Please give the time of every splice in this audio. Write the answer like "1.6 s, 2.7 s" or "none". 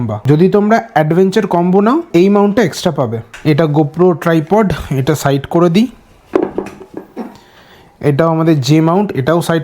none